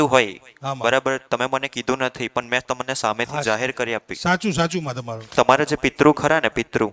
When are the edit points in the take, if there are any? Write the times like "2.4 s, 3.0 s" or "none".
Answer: 5.2 s